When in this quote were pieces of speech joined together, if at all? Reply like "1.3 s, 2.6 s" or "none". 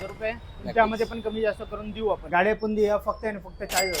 2.2 s

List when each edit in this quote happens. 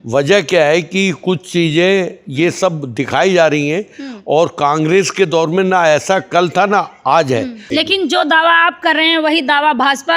7.6 s

